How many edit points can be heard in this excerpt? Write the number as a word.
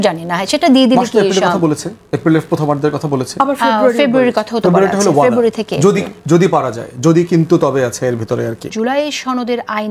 one